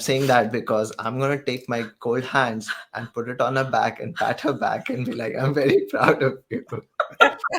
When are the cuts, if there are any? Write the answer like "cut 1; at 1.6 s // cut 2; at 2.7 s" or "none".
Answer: none